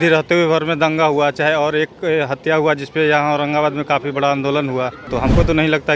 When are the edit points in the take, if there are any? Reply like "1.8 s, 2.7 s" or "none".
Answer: 5.0 s